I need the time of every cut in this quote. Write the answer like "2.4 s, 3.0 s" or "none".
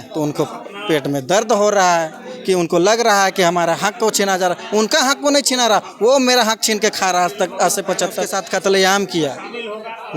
8.3 s